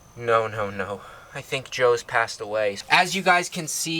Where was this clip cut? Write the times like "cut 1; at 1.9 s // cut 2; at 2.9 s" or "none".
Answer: cut 1; at 2.8 s